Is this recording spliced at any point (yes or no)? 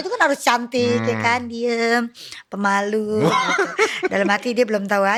no